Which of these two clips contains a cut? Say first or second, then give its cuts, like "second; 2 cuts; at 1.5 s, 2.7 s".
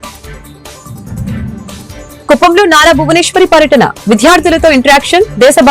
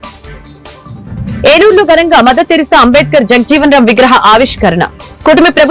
first; 1 cut; at 1.3 s